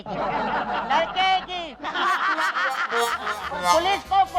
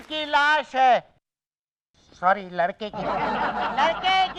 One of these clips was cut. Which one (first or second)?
first